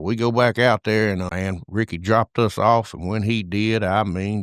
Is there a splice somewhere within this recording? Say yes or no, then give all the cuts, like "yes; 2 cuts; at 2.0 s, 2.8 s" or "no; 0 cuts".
yes; 1 cut; at 1.3 s